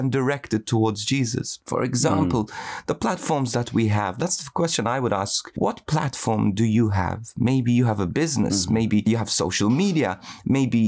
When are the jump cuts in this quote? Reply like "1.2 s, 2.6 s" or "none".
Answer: 1.6 s, 4.2 s, 5.4 s, 9.0 s